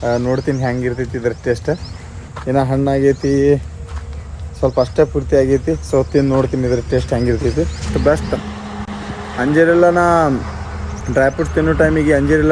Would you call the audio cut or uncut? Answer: uncut